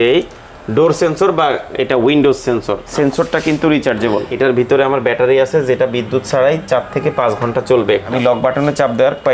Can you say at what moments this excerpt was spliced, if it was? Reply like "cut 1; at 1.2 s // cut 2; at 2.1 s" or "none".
cut 1; at 2.8 s // cut 2; at 4.3 s // cut 3; at 8.1 s